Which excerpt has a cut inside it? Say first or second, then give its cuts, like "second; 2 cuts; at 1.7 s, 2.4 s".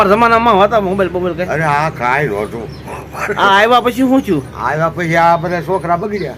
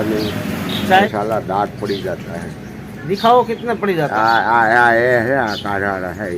second; 1 cut; at 1.1 s